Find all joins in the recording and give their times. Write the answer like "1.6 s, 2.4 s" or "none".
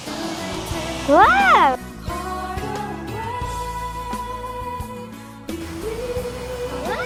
none